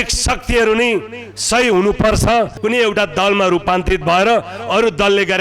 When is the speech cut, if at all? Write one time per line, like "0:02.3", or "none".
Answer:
0:02.5